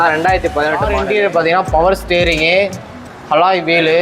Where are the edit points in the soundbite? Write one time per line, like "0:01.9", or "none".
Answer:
0:00.9